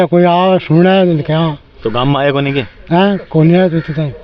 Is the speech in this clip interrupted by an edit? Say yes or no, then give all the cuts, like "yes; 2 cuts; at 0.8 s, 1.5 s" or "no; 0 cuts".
no; 0 cuts